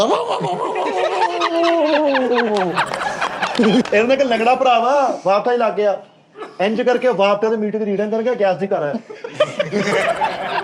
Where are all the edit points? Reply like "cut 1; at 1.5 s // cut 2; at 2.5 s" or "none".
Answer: cut 1; at 3.9 s